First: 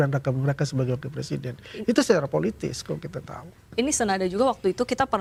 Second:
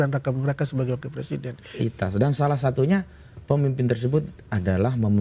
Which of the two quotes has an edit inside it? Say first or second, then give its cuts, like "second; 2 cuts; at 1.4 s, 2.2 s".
second; 1 cut; at 1.7 s